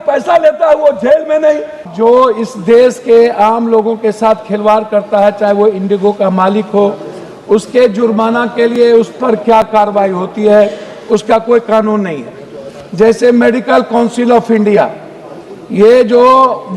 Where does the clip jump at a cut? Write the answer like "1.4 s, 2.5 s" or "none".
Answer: 1.9 s